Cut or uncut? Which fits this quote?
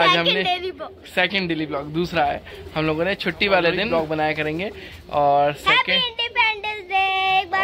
cut